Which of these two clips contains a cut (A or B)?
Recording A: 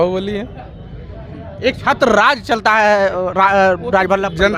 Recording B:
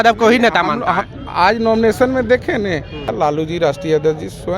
B